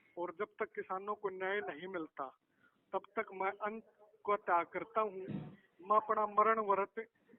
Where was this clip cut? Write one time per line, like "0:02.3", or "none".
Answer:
none